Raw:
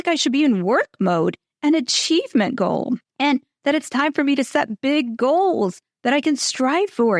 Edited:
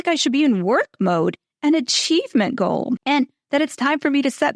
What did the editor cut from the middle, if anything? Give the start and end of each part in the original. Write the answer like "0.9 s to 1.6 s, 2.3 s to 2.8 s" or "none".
3.0 s to 3.1 s